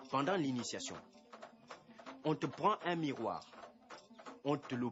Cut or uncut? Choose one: cut